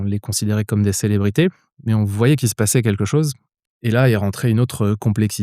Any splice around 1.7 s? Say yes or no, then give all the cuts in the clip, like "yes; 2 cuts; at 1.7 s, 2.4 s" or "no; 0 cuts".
no; 1 cut; at 3.5 s